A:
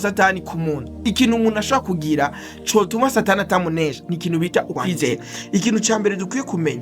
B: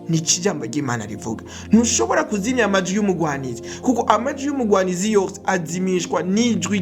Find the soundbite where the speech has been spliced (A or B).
A